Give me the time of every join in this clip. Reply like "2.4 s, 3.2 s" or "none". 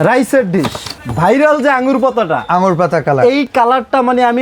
0.9 s